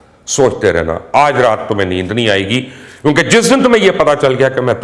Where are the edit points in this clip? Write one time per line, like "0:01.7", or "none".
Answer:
none